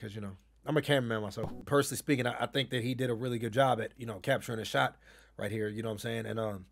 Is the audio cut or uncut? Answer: cut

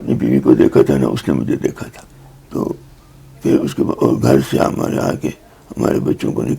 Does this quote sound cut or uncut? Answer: cut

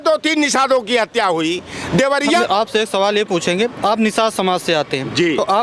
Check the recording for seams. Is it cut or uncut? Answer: cut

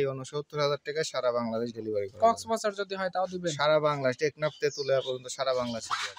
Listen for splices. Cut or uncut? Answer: uncut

